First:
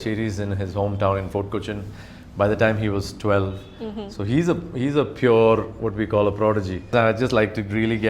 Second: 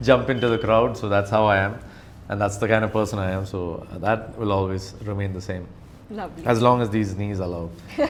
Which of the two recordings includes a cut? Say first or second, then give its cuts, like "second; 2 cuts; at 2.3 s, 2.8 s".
first; 1 cut; at 6.9 s